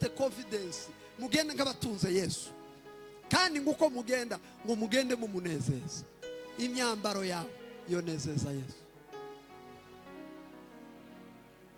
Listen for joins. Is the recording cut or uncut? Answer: uncut